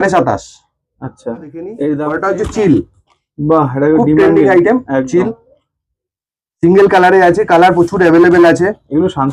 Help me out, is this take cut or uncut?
cut